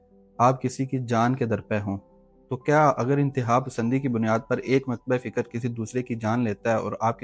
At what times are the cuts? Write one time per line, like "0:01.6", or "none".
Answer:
none